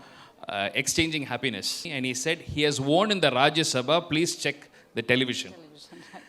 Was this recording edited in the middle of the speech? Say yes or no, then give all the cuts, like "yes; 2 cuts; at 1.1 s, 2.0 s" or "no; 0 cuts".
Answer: yes; 1 cut; at 1.9 s